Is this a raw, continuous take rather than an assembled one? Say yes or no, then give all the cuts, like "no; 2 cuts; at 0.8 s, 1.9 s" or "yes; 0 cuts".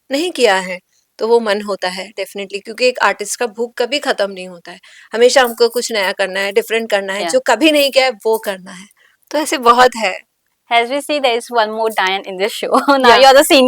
yes; 0 cuts